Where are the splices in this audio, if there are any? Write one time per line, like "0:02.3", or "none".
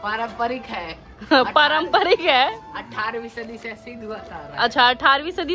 none